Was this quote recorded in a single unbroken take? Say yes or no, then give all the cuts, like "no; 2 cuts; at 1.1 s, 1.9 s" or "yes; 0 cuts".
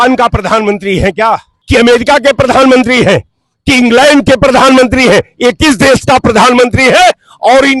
no; 1 cut; at 1.5 s